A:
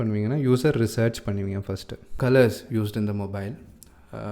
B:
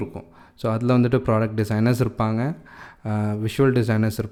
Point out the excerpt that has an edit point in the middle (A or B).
A